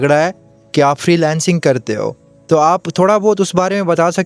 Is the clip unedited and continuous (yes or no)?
yes